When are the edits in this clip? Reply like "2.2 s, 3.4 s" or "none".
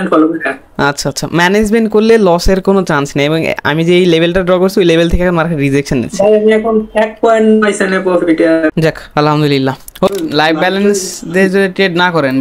8.7 s, 10.1 s